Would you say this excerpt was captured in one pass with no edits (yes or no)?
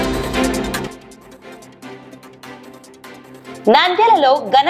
yes